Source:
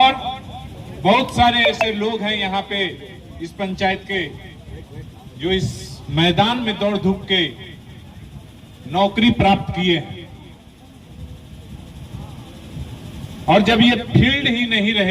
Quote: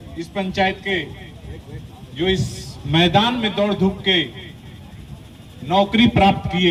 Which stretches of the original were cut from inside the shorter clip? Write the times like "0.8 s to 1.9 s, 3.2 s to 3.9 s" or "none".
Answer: none